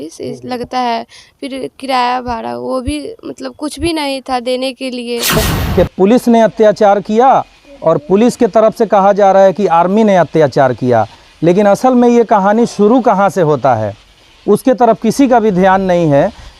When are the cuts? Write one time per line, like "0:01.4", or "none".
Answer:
0:05.5